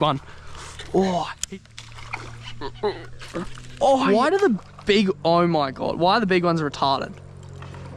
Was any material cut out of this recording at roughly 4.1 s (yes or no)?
yes